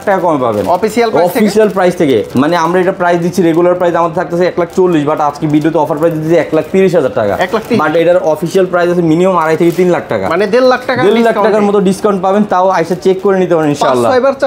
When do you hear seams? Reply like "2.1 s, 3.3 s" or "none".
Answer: none